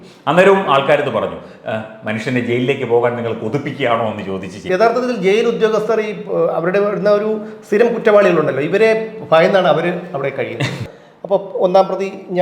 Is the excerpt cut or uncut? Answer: cut